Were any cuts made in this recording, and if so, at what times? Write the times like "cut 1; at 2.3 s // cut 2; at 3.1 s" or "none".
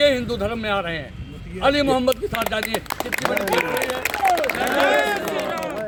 none